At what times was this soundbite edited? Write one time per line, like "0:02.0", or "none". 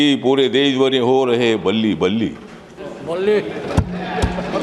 none